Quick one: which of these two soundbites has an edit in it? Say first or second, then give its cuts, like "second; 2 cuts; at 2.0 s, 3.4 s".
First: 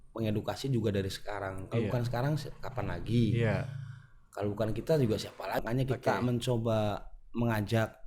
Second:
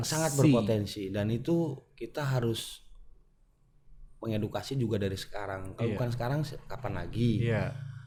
first; 1 cut; at 5.6 s